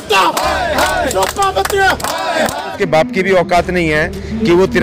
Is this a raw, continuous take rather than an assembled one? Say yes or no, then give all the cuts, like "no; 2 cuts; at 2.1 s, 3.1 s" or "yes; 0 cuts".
no; 1 cut; at 2.7 s